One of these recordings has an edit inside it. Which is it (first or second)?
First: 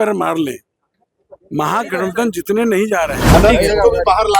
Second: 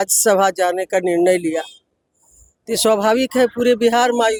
first